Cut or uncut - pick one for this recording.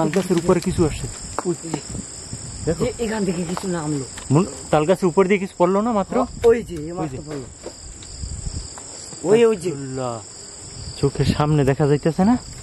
uncut